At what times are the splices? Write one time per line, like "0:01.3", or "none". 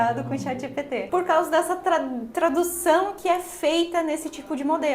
0:01.0